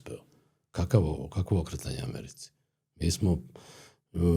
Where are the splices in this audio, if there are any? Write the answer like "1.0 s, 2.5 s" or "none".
none